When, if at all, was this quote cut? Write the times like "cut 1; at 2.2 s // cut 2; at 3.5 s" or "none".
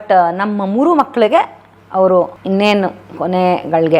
cut 1; at 1.8 s